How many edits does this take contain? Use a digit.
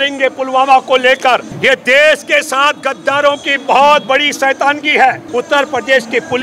2